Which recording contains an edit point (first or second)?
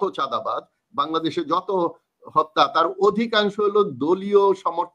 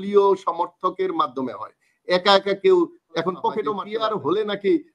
second